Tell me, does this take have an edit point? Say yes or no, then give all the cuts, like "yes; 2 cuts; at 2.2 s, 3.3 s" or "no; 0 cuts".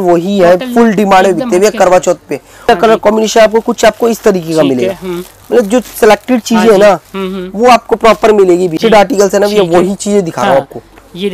yes; 2 cuts; at 2.6 s, 8.8 s